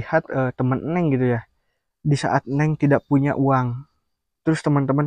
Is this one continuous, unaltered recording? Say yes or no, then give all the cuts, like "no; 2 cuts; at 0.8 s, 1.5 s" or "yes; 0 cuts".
yes; 0 cuts